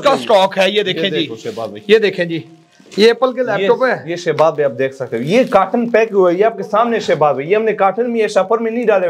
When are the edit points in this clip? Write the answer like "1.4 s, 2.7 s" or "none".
none